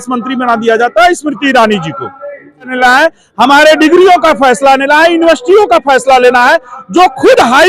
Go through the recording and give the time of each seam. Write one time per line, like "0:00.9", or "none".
0:02.7

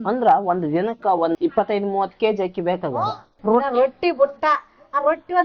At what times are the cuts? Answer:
0:03.3

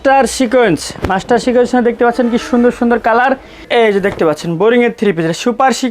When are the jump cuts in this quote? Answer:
0:03.5

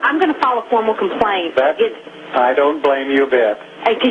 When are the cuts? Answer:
0:02.1

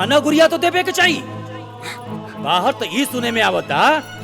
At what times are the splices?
none

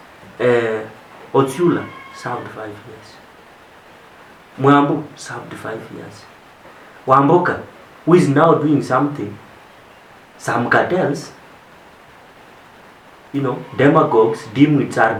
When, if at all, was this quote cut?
none

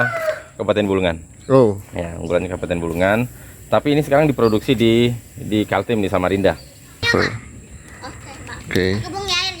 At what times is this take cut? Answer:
0:07.1

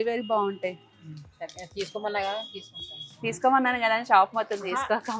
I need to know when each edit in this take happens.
none

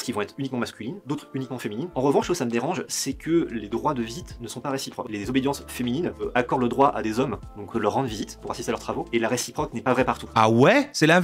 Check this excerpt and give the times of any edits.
0:01.9
0:05.1
0:06.2
0:07.7
0:10.3

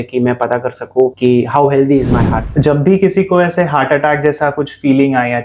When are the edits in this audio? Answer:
0:01.2
0:02.4

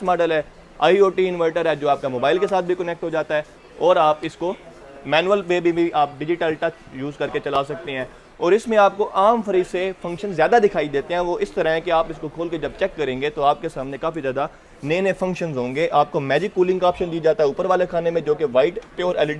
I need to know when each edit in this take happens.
none

